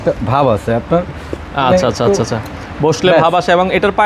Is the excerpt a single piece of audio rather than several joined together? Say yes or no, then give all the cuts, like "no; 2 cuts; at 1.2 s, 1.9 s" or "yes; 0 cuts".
yes; 0 cuts